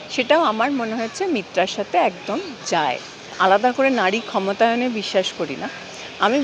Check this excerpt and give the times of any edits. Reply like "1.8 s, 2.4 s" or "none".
3.6 s